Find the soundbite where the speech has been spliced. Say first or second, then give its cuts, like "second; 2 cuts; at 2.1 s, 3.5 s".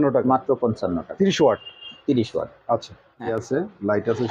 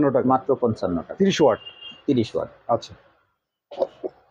first; 1 cut; at 3.3 s